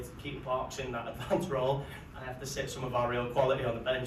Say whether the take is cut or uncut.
uncut